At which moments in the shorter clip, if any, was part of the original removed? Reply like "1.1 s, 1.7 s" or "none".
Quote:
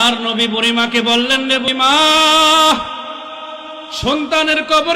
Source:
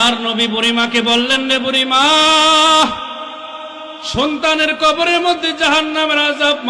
1.7 s